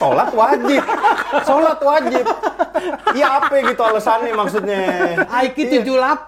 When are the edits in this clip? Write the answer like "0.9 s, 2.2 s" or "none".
5.2 s

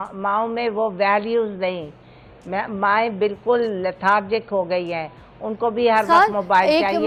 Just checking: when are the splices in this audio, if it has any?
none

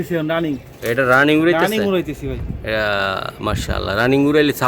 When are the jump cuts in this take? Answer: none

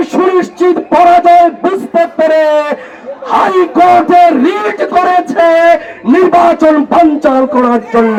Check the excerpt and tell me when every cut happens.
none

